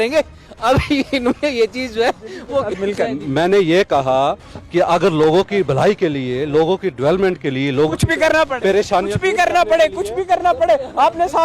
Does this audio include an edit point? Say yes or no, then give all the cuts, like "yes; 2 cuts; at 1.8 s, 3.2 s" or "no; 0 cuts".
no; 0 cuts